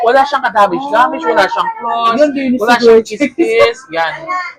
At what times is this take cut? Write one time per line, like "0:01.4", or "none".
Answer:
none